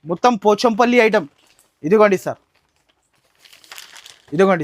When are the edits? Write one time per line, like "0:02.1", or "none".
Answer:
none